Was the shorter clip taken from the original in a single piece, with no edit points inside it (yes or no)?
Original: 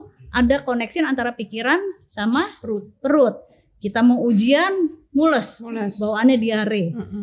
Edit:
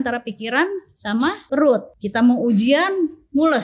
no